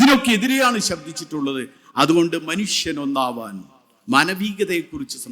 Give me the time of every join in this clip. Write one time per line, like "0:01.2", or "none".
none